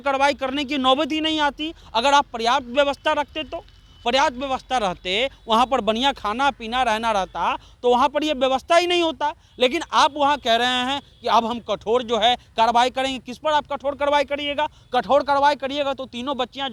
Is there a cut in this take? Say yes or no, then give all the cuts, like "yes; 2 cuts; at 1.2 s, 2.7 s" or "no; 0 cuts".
no; 0 cuts